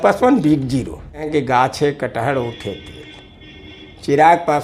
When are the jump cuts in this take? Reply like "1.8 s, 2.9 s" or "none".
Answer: 1.3 s